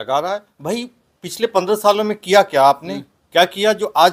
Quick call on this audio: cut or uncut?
uncut